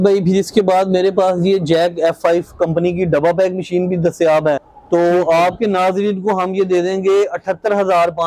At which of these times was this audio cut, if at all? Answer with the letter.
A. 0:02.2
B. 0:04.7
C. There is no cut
B